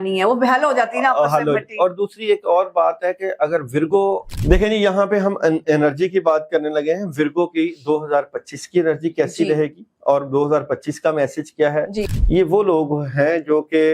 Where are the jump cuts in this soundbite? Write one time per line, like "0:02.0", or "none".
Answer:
0:04.3
0:12.1